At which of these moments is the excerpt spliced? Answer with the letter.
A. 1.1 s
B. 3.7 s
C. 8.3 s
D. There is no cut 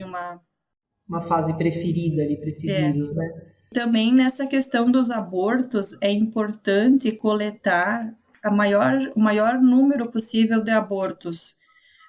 B